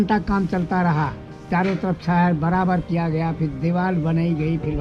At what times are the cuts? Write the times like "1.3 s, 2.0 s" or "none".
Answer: none